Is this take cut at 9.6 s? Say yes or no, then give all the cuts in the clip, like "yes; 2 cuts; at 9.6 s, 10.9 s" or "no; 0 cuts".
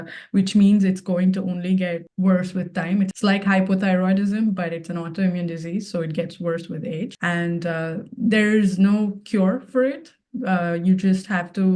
no; 3 cuts; at 2.1 s, 3.1 s, 7.2 s